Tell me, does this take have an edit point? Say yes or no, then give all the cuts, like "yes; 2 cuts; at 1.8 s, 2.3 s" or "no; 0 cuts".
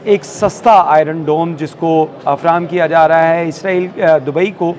no; 0 cuts